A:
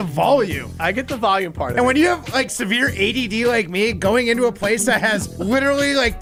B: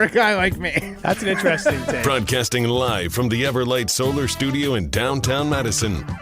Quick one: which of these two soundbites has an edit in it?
B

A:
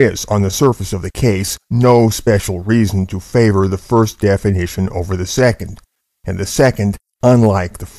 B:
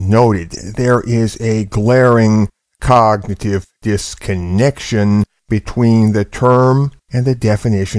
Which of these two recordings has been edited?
A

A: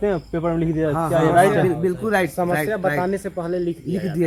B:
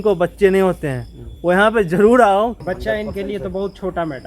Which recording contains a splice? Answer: B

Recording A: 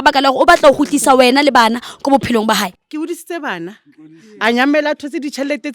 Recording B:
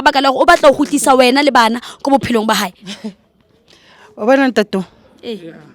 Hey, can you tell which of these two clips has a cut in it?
A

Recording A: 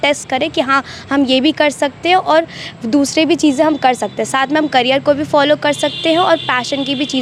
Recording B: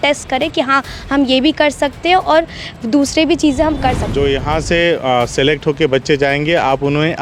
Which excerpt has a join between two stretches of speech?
B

